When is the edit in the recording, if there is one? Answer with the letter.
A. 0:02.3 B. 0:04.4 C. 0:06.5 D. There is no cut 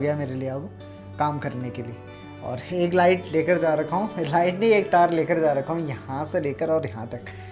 D